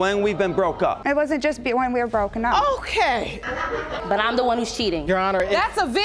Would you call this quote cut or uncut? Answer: cut